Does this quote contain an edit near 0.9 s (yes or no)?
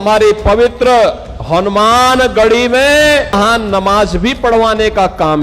no